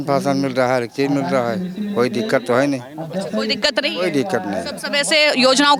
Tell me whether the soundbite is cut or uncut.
uncut